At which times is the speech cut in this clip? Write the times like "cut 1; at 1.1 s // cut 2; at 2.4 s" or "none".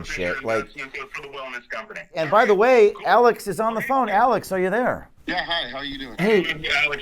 cut 1; at 2.1 s // cut 2; at 5.1 s